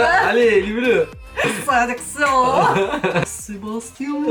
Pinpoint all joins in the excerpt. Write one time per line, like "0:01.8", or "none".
0:01.5
0:03.2